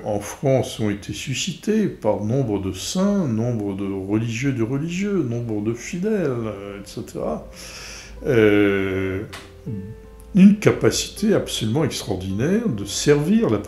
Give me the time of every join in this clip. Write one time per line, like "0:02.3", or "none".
none